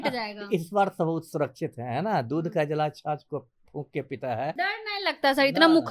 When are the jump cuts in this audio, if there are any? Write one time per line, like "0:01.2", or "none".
0:04.5